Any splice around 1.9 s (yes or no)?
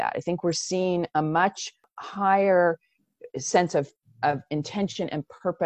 yes